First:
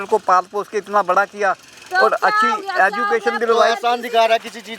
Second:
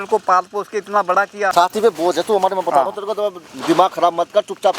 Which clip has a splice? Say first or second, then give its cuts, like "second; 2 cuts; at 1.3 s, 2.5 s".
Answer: second; 2 cuts; at 1.5 s, 3.5 s